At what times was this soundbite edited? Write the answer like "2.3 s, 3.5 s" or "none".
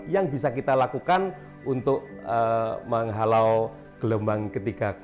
none